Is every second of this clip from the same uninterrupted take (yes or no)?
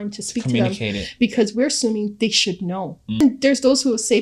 no